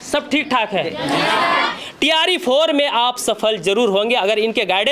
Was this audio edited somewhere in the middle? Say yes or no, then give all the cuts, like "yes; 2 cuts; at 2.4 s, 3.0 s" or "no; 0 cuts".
yes; 1 cut; at 1.7 s